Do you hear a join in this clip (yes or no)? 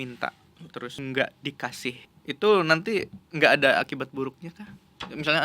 yes